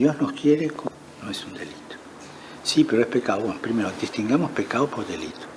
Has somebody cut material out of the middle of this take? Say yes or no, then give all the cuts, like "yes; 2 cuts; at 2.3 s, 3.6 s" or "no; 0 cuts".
yes; 1 cut; at 0.9 s